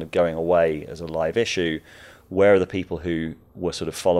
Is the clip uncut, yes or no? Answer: yes